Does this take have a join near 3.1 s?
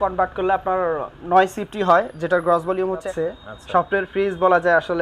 yes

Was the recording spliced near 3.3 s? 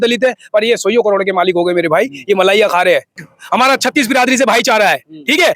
yes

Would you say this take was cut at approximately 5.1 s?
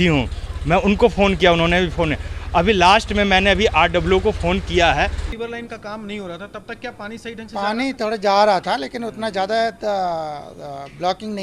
yes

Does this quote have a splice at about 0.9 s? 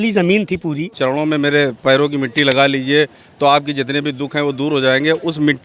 yes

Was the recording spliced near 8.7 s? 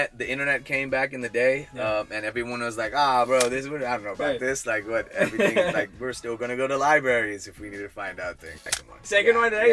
yes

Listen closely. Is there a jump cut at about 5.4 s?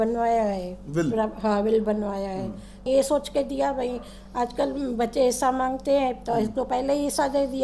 no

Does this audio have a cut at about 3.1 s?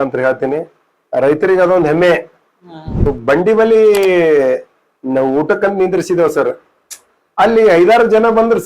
yes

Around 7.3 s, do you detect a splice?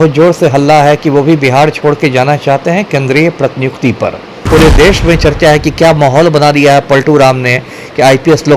no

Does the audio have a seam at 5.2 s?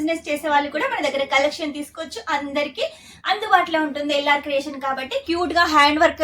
yes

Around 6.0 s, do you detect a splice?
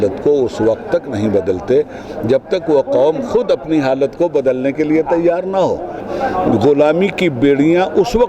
yes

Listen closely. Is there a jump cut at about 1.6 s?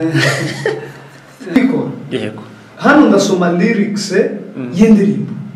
yes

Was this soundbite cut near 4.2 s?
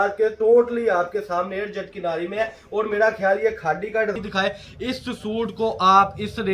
yes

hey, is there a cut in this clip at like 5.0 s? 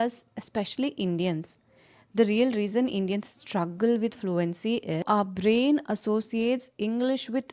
yes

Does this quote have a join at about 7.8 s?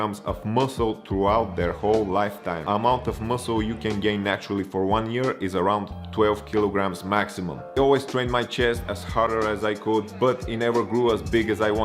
yes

